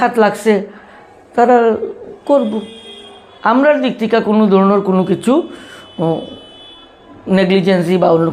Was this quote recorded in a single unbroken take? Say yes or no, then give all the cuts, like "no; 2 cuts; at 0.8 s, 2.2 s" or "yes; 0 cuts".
yes; 0 cuts